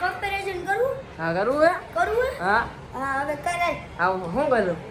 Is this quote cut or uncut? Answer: uncut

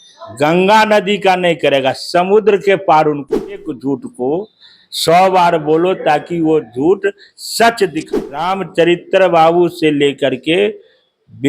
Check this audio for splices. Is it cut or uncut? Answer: cut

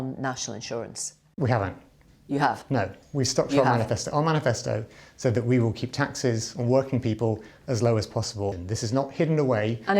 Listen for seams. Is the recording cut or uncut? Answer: cut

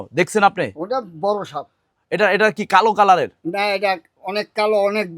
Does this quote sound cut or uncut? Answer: cut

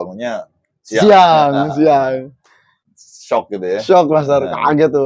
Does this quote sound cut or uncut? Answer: uncut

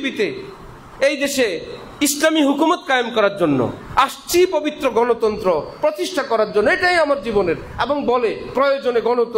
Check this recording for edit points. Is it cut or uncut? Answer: uncut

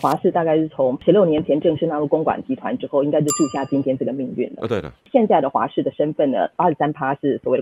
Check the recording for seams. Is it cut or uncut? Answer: cut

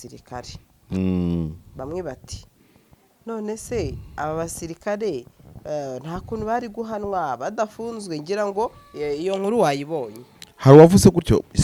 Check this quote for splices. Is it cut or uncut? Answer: uncut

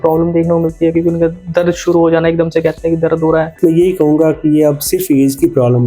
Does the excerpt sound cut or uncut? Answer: cut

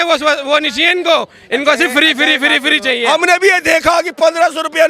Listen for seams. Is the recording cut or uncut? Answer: cut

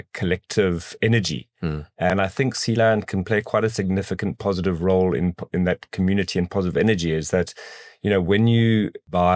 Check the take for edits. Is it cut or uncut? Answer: uncut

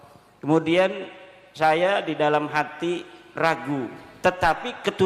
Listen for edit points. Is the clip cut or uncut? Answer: cut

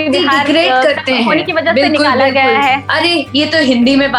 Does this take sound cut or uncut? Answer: cut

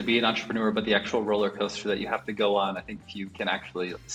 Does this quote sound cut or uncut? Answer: uncut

